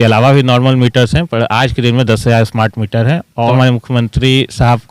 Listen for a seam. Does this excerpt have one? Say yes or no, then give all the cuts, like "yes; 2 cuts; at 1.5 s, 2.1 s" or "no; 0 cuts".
yes; 1 cut; at 3.5 s